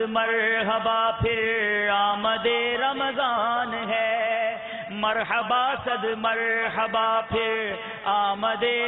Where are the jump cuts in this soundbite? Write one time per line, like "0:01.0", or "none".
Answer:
none